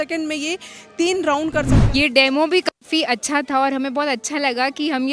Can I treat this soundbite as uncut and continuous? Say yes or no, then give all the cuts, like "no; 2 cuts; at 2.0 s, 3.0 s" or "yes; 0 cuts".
no; 1 cut; at 1.8 s